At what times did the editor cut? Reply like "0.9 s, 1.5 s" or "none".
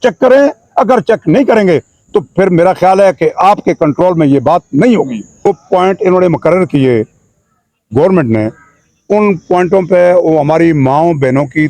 5.5 s